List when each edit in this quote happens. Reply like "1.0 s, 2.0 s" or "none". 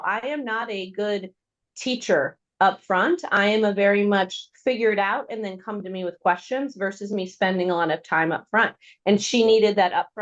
none